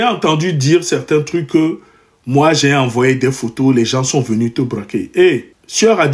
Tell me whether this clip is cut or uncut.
uncut